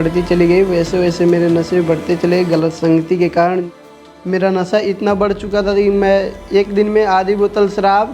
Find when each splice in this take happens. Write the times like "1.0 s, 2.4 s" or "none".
3.7 s